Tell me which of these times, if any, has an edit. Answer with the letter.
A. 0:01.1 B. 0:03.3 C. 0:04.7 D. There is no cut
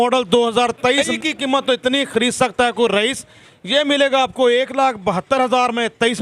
A